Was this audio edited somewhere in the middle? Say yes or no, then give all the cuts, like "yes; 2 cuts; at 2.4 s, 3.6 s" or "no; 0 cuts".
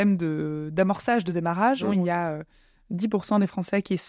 yes; 1 cut; at 1.9 s